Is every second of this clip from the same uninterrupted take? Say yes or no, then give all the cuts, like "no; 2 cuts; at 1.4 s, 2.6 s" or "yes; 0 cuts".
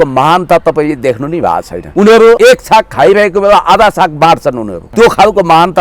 no; 3 cuts; at 1.8 s, 2.4 s, 4.8 s